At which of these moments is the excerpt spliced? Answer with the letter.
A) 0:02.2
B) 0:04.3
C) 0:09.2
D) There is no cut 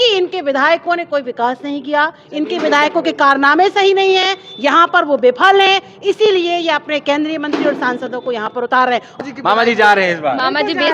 C